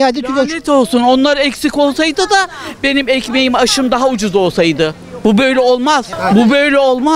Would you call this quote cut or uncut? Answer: cut